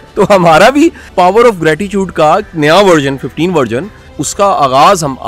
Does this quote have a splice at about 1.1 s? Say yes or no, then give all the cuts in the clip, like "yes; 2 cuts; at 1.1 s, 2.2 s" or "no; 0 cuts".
yes; 2 cuts; at 1.1 s, 4.2 s